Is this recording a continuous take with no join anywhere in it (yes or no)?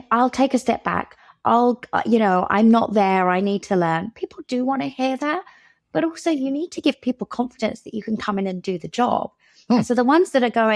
yes